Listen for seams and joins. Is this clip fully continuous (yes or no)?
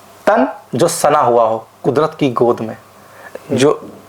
yes